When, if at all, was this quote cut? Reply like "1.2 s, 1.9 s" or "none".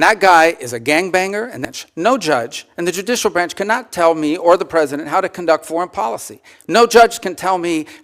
1.6 s